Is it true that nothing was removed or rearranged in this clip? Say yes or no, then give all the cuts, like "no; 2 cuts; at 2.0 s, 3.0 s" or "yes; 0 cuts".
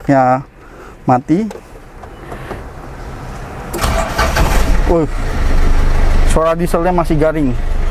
yes; 0 cuts